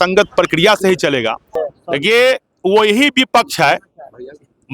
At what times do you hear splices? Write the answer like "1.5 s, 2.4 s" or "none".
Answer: 1.7 s